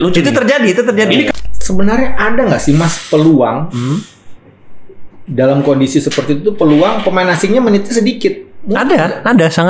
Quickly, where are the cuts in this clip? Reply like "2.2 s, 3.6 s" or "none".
1.3 s